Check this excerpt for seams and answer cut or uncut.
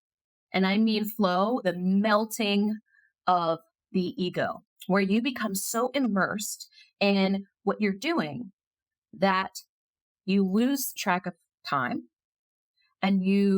cut